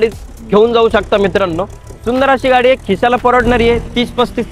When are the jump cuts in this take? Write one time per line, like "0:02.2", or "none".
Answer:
none